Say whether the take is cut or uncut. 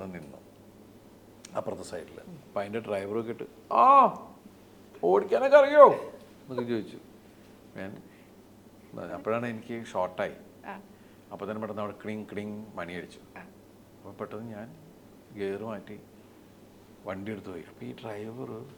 uncut